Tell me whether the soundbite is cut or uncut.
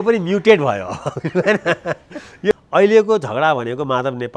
cut